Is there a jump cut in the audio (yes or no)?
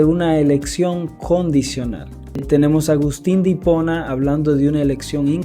yes